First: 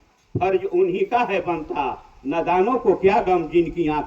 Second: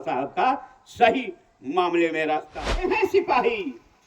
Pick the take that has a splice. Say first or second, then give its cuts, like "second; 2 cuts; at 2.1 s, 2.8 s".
second; 1 cut; at 2.7 s